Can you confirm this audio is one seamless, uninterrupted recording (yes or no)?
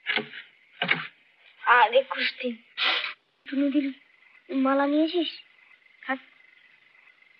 no